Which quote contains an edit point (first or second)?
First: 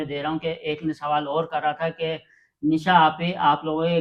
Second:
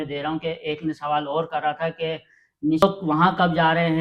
second